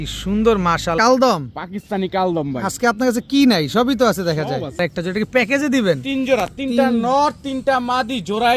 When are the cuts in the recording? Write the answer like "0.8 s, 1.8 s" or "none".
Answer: 1.0 s, 4.8 s